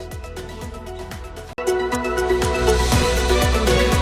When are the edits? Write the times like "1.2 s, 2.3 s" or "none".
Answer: none

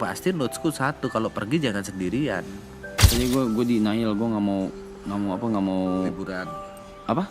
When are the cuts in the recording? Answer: 3.1 s

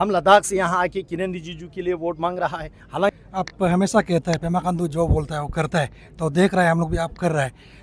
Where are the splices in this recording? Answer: 3.2 s

